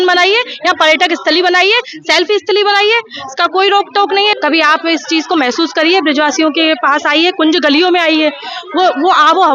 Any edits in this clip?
yes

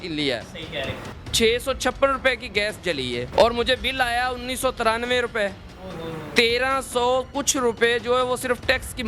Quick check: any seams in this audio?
yes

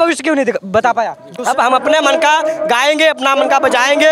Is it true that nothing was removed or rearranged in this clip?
no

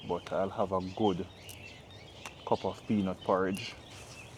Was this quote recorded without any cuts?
yes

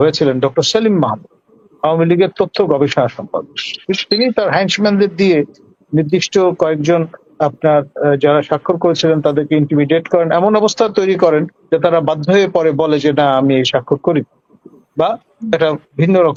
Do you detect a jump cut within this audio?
no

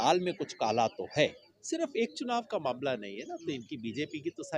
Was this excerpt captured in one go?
no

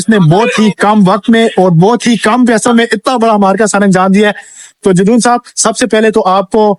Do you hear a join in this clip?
no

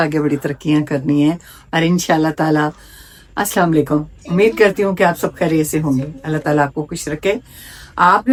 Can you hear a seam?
no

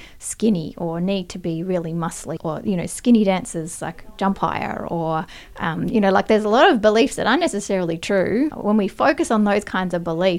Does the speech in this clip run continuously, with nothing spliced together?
no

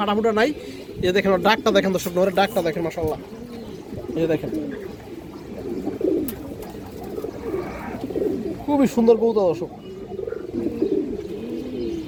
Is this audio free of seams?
yes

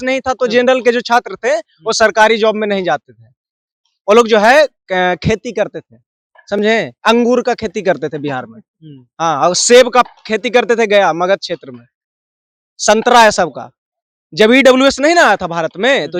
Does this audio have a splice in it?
no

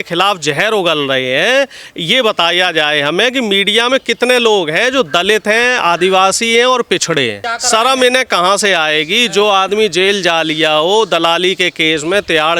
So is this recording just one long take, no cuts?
no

